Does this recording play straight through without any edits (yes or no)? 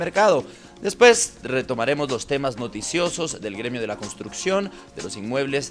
no